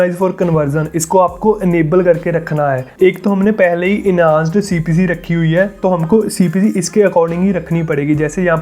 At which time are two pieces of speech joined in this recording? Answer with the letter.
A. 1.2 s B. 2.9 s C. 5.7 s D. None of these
B